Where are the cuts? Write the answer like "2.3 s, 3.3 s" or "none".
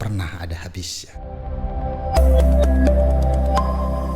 1.0 s